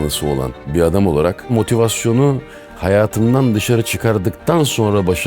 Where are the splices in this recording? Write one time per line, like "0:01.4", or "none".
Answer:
0:01.5